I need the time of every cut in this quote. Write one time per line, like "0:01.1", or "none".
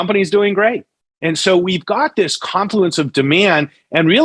0:01.0